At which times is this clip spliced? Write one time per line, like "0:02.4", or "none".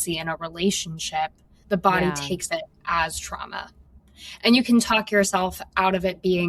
0:01.5